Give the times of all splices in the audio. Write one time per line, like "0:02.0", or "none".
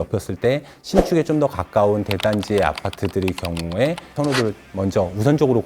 0:04.1